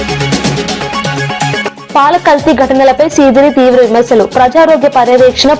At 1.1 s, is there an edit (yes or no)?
yes